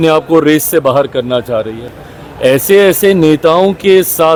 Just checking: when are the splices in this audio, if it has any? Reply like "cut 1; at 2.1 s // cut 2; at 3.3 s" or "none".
none